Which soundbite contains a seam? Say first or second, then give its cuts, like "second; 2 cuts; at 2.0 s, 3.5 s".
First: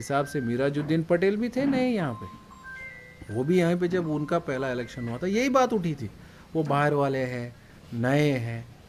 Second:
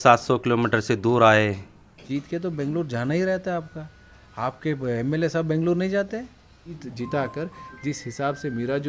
second; 2 cuts; at 2.0 s, 6.9 s